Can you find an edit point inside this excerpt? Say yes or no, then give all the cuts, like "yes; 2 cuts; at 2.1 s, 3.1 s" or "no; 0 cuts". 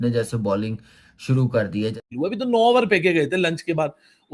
yes; 1 cut; at 2.0 s